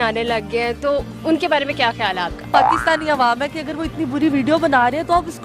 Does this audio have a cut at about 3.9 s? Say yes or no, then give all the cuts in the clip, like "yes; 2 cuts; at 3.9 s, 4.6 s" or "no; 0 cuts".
no; 1 cut; at 2.5 s